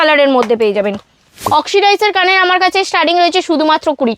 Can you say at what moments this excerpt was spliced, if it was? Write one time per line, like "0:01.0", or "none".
0:01.4